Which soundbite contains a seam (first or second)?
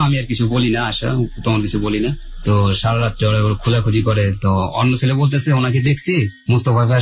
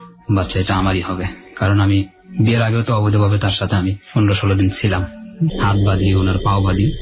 second